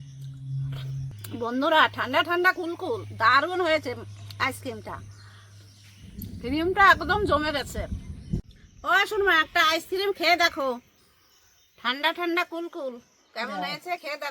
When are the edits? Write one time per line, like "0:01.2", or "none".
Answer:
0:01.2
0:08.4